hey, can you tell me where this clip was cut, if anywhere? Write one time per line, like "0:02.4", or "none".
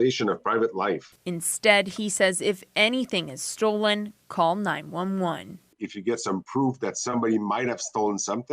0:01.9